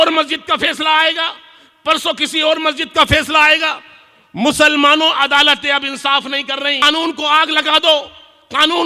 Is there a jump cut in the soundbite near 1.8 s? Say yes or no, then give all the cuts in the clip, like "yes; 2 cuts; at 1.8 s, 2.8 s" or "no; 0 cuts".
no; 1 cut; at 6.8 s